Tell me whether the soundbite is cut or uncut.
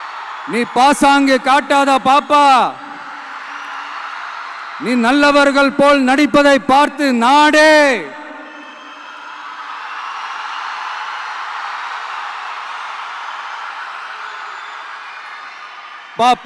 uncut